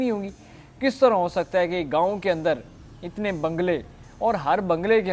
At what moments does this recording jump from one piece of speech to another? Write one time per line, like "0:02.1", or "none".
none